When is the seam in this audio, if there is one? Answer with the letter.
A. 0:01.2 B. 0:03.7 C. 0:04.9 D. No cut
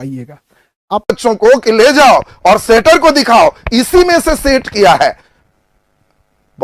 A